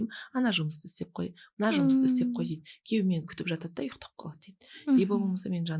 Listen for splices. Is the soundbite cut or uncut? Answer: uncut